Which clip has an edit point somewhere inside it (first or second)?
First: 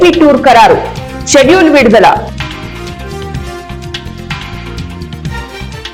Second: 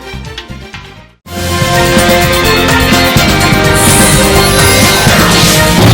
second